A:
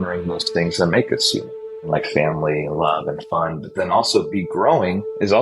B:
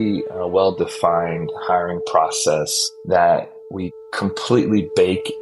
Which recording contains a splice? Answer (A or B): A